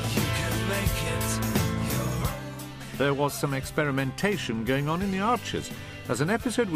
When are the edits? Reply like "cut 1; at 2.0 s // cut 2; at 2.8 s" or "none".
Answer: cut 1; at 2.0 s